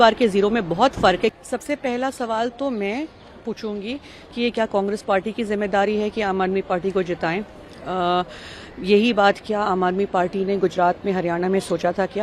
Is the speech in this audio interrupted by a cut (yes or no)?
yes